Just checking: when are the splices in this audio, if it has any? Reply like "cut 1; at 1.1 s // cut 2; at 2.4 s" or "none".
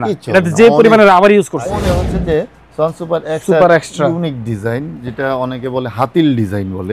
cut 1; at 1.9 s